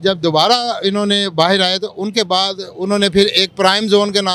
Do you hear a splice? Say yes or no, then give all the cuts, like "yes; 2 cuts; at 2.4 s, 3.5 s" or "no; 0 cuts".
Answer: no; 0 cuts